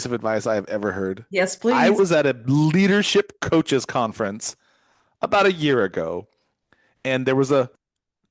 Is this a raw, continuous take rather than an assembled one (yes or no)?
no